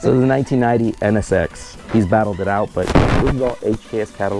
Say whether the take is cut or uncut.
cut